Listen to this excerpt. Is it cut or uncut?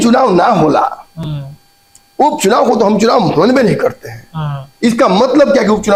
uncut